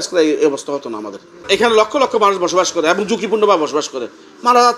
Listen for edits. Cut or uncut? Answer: cut